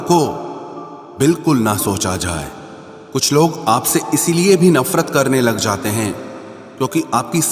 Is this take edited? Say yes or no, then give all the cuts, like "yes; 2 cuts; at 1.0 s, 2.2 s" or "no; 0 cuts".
yes; 1 cut; at 2.5 s